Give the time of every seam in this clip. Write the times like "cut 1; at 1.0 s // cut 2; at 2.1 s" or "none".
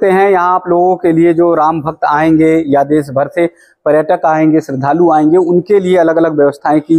none